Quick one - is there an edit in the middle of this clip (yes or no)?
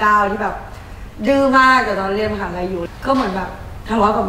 yes